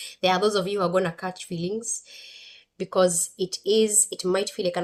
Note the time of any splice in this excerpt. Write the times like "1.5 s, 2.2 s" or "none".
none